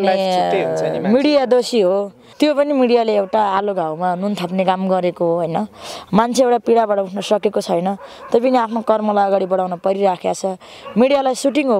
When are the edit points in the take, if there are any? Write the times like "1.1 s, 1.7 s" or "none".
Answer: 2.2 s